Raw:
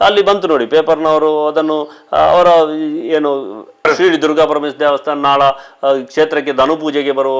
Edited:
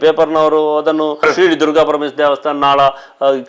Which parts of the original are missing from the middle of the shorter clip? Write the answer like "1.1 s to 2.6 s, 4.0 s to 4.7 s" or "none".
1.8 s to 3.8 s